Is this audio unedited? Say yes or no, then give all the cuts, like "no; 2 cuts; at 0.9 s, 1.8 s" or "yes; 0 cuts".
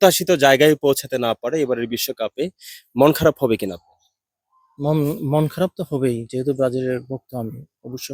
yes; 0 cuts